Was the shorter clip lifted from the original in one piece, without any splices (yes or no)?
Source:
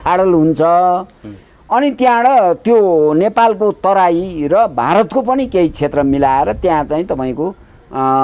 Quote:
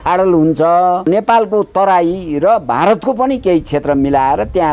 no